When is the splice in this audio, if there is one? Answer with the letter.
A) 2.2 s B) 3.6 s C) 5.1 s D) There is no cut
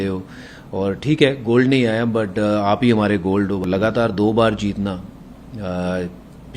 B